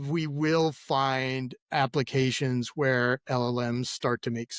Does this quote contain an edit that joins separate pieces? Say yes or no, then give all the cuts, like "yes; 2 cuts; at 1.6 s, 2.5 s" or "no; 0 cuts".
yes; 1 cut; at 1.5 s